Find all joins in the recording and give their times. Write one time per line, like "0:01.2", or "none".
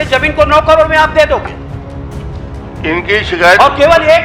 none